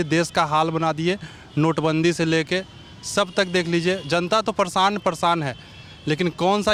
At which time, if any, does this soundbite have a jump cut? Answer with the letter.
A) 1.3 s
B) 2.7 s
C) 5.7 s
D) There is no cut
D